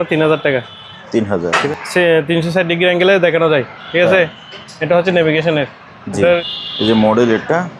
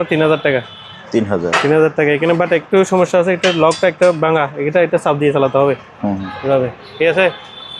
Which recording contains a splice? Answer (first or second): first